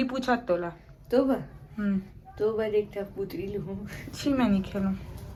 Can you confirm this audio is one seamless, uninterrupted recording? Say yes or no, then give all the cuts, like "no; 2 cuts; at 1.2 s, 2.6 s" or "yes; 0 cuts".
yes; 0 cuts